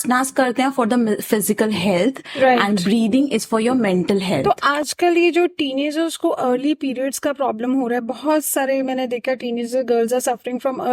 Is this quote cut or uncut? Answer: cut